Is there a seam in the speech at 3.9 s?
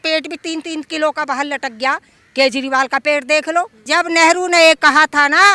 yes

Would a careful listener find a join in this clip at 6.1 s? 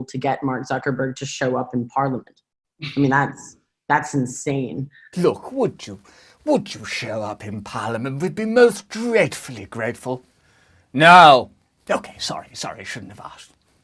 no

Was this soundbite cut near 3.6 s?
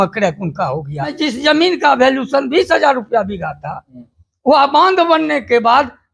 no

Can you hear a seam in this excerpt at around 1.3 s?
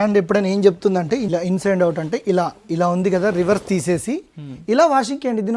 yes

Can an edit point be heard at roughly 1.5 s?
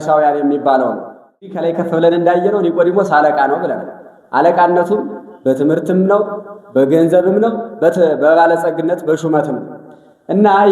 yes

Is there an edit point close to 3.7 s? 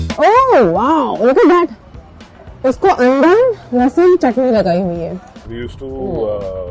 no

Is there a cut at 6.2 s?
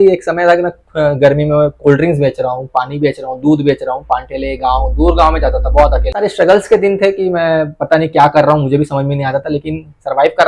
yes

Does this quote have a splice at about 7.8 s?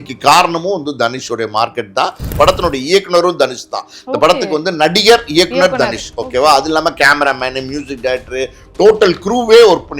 no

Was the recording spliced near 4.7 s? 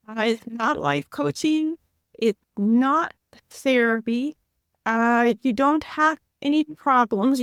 no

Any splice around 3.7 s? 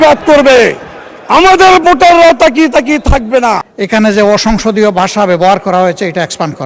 yes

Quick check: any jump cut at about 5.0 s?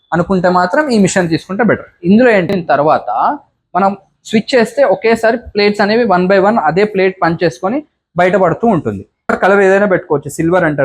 no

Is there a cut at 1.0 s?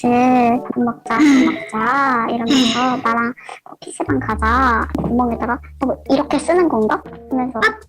no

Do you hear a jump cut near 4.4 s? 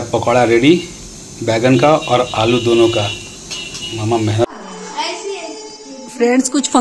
yes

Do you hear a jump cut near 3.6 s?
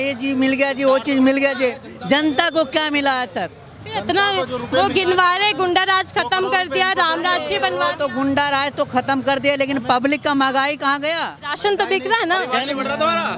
no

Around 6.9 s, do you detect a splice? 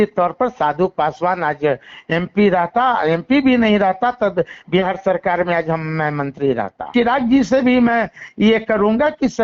yes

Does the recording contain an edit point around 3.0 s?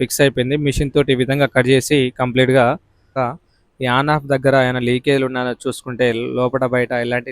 yes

